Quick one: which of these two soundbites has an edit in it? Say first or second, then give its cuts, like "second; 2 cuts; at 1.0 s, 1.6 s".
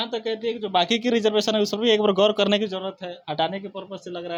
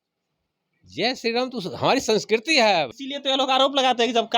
second; 1 cut; at 2.9 s